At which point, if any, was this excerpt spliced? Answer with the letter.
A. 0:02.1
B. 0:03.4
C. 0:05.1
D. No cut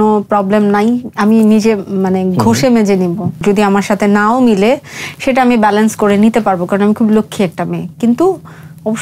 B